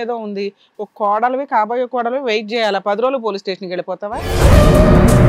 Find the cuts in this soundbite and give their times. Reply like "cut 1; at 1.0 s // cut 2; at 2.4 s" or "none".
cut 1; at 4.2 s